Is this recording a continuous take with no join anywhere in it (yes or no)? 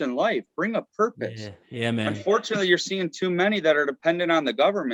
yes